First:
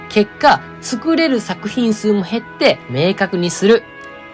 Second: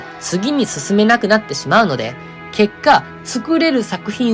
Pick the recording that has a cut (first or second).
first